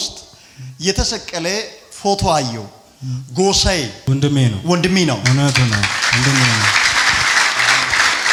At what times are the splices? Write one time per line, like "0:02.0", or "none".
none